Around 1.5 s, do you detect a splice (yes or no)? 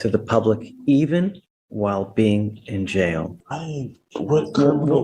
no